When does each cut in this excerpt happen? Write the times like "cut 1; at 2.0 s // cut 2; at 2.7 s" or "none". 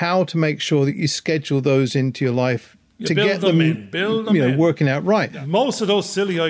cut 1; at 5.4 s